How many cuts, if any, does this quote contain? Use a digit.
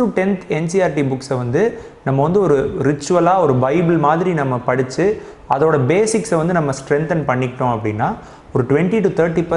0